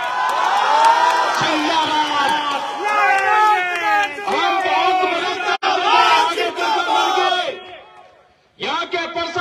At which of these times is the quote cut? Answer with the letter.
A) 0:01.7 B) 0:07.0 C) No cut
C